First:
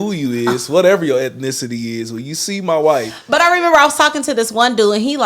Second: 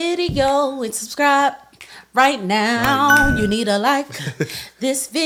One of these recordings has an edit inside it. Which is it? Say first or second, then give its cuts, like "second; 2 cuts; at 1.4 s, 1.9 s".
first; 1 cut; at 3.2 s